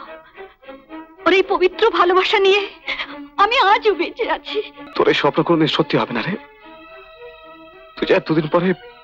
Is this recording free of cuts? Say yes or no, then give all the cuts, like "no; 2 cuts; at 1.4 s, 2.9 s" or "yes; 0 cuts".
no; 1 cut; at 4.8 s